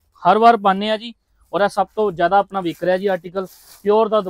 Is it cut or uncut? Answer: uncut